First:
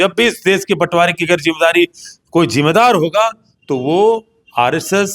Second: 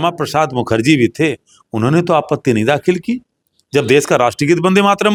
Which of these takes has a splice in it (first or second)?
first